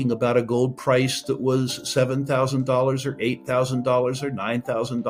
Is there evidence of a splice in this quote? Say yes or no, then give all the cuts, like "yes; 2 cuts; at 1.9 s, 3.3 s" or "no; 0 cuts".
no; 0 cuts